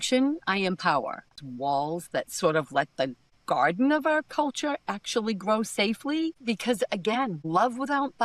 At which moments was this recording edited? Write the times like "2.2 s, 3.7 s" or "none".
1.3 s